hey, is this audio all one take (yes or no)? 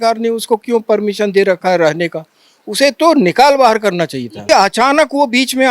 no